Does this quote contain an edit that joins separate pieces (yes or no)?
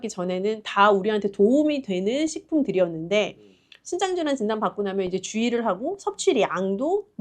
no